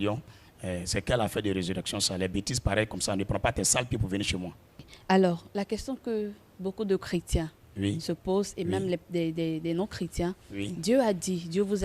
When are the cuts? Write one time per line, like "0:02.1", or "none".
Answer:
0:04.9